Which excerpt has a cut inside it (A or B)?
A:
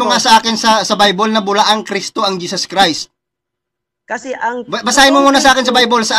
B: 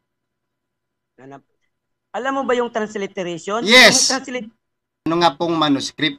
B